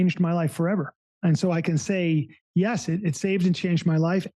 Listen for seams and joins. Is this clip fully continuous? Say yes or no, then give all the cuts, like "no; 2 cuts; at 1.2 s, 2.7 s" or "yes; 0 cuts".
no; 1 cut; at 1.0 s